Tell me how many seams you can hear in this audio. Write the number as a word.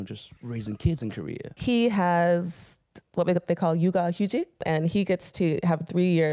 two